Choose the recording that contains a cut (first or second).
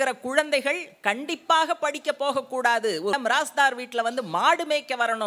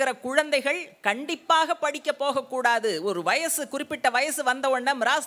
first